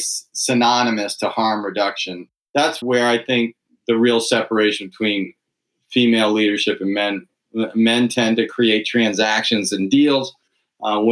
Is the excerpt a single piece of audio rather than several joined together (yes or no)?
no